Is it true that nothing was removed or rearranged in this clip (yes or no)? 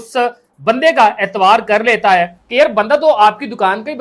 no